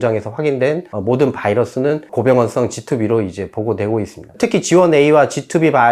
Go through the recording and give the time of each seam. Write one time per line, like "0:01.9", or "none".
0:00.9
0:02.1
0:04.2